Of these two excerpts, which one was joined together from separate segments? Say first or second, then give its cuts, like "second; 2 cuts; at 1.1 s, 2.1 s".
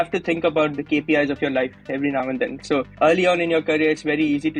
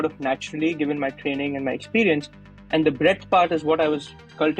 first; 2 cuts; at 0.7 s, 2.6 s